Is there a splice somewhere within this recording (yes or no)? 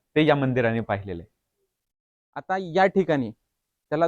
yes